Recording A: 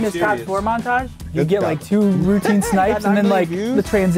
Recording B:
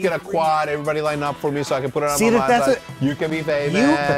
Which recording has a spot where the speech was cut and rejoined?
A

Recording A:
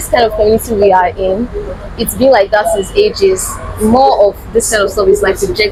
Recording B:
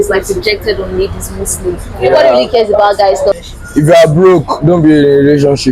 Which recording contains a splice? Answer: B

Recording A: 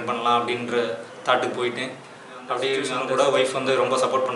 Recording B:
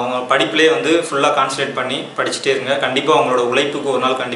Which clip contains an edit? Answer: A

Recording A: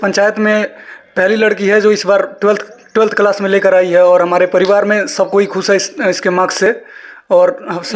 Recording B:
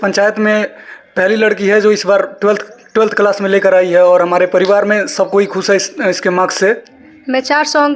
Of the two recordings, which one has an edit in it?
B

